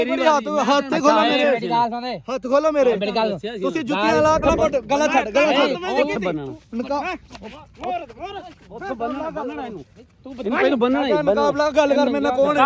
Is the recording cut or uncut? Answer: cut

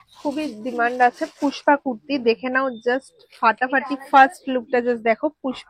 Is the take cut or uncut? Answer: uncut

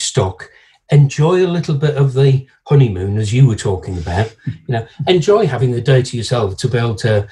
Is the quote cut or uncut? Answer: cut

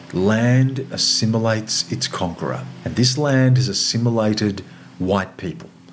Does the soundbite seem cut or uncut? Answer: cut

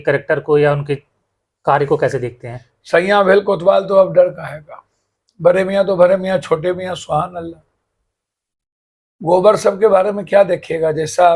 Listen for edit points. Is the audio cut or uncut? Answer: uncut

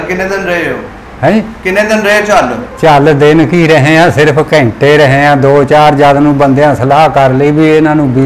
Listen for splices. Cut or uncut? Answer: uncut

